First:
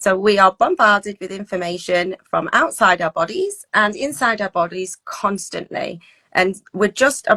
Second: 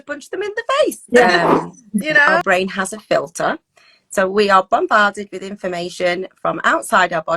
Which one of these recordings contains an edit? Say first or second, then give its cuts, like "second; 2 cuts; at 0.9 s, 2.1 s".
second; 1 cut; at 2.4 s